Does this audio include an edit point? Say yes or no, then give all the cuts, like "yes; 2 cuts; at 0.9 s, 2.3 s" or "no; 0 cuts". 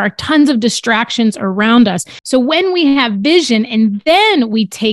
yes; 1 cut; at 2.1 s